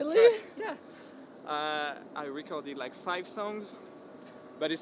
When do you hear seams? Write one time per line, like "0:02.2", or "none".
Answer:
none